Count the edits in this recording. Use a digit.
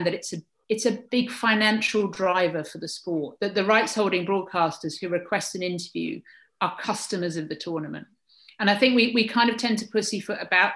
0